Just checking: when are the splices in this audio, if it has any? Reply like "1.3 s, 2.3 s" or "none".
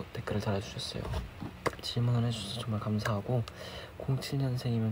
1.8 s